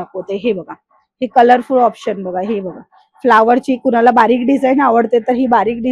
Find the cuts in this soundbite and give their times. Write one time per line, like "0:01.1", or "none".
none